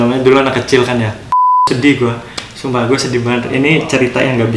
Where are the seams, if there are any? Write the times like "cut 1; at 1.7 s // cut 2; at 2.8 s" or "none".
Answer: cut 1; at 1.7 s